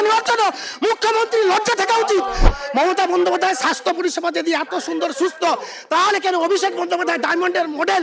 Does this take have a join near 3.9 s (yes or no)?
no